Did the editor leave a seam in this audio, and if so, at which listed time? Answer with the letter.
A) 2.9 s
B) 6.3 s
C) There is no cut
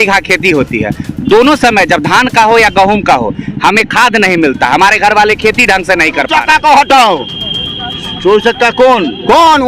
B